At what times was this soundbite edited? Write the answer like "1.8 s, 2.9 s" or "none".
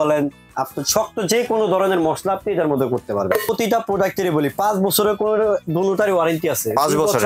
3.5 s

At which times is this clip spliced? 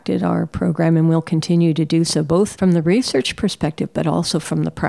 2.5 s

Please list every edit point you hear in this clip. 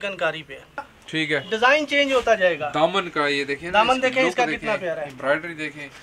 0.9 s

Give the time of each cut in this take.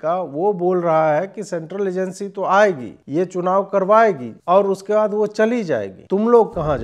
2.9 s, 4.3 s, 5.9 s

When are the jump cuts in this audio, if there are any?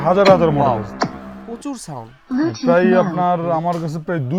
none

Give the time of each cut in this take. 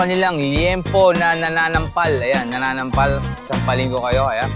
none

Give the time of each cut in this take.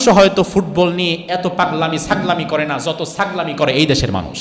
none

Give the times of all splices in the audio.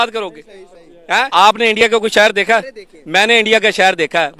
1.3 s

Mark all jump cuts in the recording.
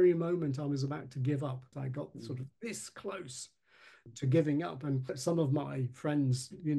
none

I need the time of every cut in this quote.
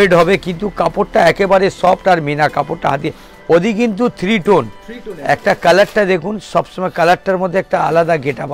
none

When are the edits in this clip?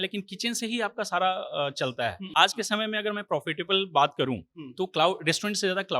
2.2 s

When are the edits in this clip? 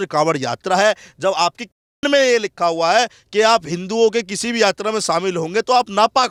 none

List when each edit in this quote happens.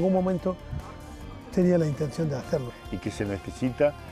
2.7 s

